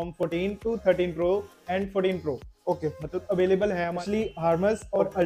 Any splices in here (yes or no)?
yes